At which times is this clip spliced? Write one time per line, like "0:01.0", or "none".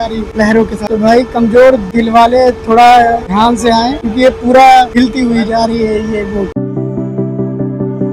none